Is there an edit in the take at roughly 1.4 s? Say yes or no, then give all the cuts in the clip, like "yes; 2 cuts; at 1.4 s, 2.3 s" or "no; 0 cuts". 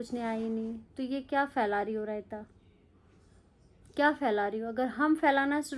no; 0 cuts